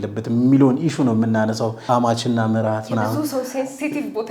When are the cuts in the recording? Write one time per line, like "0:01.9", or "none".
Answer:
0:01.9